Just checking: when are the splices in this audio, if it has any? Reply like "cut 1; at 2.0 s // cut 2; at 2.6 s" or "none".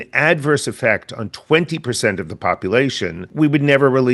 cut 1; at 3.2 s